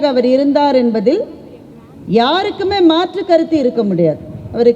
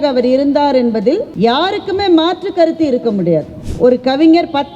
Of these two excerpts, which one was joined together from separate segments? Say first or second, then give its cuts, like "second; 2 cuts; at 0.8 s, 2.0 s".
second; 2 cuts; at 1.3 s, 3.6 s